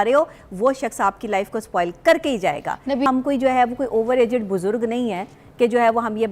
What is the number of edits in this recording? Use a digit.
1